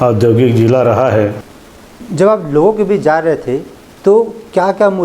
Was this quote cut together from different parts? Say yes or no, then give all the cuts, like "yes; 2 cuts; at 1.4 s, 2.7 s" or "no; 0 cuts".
yes; 1 cut; at 1.5 s